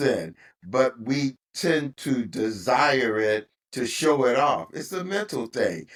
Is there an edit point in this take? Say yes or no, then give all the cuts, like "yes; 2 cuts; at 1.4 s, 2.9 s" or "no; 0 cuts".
no; 0 cuts